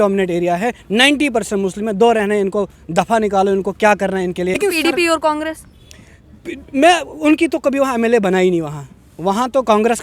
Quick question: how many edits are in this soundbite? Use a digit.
1